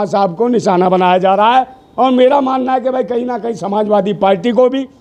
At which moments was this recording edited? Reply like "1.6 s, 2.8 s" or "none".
none